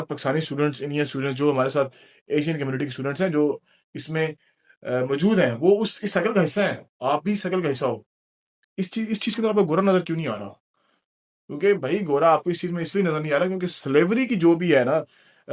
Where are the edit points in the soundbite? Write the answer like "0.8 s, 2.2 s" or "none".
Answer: 8.7 s